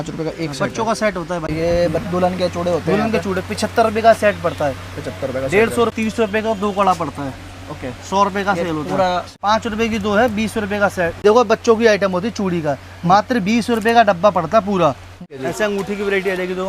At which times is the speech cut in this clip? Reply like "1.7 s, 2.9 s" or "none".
1.5 s, 5.9 s, 9.3 s, 11.1 s, 15.2 s